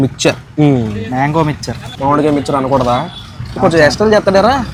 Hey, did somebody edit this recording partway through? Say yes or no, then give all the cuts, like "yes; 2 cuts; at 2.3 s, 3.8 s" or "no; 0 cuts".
no; 0 cuts